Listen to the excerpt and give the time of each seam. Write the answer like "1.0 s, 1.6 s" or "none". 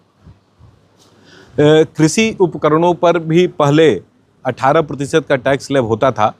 none